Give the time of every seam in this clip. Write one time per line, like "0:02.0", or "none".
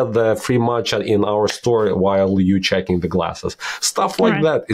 none